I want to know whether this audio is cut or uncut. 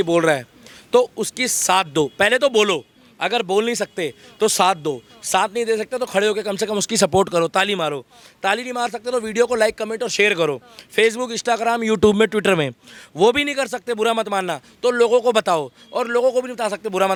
uncut